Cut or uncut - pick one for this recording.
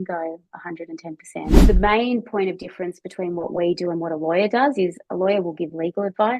cut